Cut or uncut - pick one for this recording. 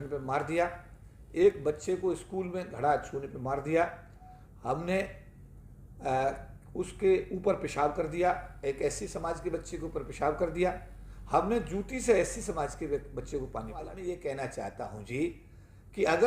cut